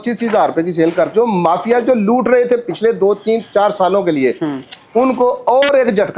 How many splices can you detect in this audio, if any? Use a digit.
1